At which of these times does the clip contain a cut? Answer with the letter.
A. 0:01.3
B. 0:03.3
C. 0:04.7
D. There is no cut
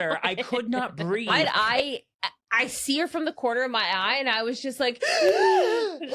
A